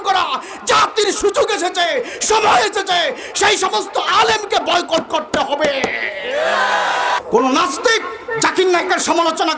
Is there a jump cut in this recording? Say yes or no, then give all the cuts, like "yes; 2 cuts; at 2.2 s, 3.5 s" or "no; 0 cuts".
yes; 1 cut; at 7.2 s